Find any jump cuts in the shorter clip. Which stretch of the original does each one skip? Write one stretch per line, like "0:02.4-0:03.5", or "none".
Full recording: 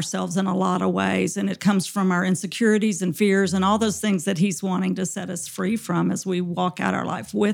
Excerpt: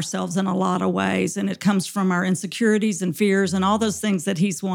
none